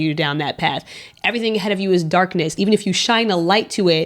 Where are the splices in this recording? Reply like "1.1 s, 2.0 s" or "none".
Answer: 2.5 s